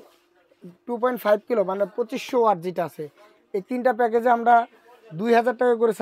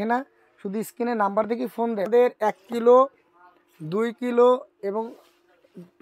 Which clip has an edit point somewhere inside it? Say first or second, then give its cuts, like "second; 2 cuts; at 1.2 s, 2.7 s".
second; 1 cut; at 2.1 s